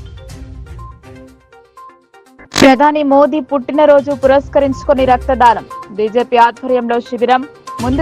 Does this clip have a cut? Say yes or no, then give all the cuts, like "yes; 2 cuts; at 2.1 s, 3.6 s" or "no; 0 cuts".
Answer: no; 0 cuts